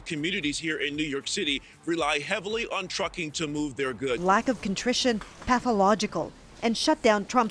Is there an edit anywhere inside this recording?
yes; 1 cut; at 4.2 s

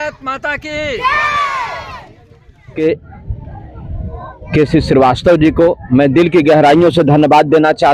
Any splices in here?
yes; 1 cut; at 2.7 s

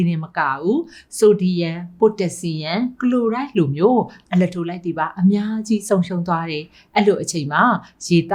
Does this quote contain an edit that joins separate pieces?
no; 0 cuts

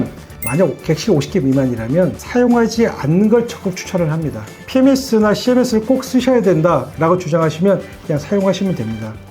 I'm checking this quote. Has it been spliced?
yes; 1 cut; at 4.5 s

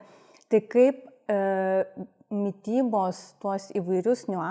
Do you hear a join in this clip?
no; 0 cuts

